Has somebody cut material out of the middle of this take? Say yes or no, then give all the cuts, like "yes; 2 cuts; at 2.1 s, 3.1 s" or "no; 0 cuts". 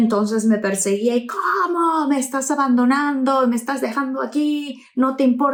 no; 0 cuts